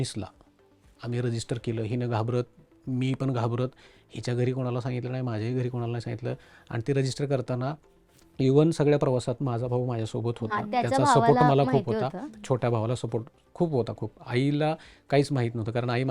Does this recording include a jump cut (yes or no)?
no